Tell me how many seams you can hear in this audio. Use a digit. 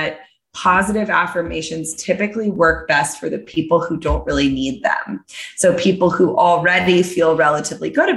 0